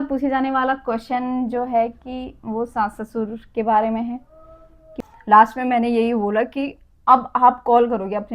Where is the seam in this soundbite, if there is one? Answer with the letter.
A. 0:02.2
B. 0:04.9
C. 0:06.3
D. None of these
B